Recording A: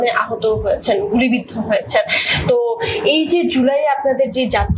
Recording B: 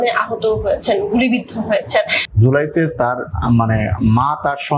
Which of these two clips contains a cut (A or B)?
B